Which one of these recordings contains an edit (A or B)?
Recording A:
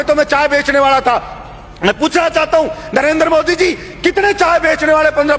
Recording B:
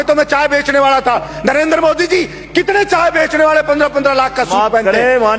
B